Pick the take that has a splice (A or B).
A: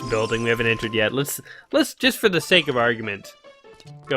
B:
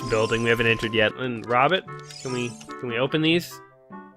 B